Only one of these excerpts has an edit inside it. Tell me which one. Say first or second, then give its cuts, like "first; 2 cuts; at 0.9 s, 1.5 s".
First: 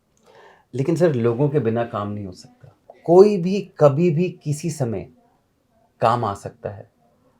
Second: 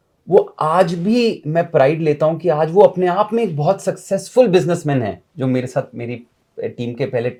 first; 1 cut; at 2.9 s